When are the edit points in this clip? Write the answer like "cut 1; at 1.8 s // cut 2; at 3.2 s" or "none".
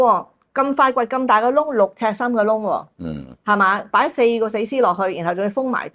none